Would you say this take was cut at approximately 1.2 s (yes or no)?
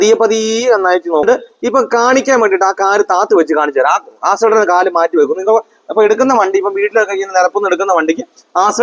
yes